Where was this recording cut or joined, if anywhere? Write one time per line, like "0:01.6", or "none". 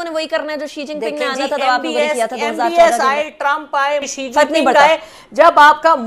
0:04.1